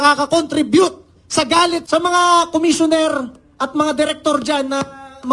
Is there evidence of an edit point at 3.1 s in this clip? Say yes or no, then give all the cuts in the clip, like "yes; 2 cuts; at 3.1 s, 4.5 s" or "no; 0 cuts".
no; 1 cut; at 1.8 s